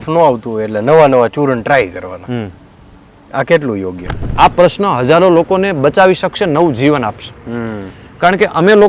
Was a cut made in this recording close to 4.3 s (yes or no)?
yes